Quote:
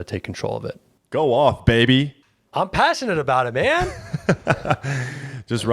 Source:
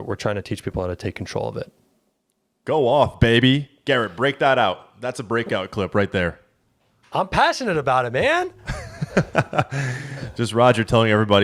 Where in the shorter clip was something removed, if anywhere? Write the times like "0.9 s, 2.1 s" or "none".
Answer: 0.9 s, 2.2 s, 4.1 s